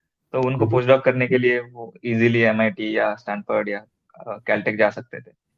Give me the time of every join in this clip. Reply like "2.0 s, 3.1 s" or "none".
none

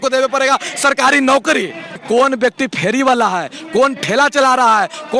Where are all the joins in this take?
2.0 s

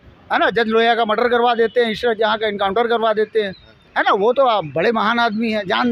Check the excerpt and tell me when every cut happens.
none

